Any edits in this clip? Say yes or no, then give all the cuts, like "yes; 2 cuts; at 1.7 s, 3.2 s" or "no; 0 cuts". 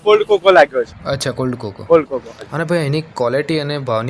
no; 0 cuts